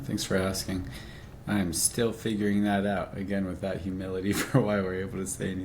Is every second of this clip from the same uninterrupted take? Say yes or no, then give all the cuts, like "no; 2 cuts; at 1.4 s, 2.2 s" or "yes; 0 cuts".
yes; 0 cuts